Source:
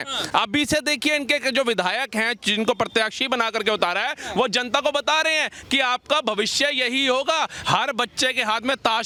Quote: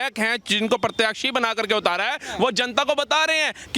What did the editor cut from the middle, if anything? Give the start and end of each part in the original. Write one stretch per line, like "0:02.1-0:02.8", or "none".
none